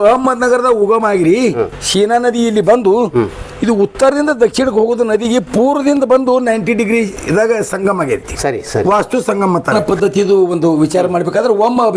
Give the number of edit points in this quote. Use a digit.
1